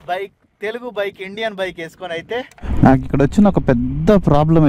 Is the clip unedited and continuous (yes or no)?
no